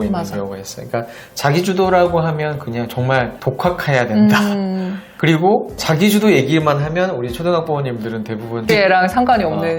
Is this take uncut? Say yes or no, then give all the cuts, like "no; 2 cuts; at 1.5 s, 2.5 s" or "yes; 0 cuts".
no; 1 cut; at 8.7 s